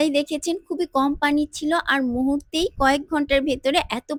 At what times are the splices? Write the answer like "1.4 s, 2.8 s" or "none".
none